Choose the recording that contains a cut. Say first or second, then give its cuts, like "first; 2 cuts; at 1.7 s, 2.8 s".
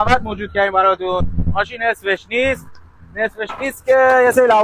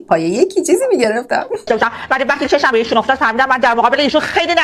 second; 1 cut; at 1.6 s